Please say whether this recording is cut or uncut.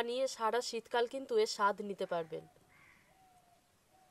uncut